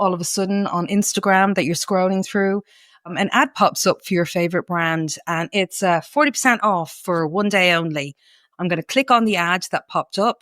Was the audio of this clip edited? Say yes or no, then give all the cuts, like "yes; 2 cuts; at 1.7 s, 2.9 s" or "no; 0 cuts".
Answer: yes; 1 cut; at 8.4 s